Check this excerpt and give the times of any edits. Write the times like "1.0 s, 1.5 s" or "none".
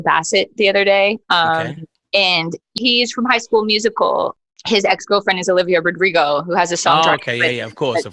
2.8 s, 4.4 s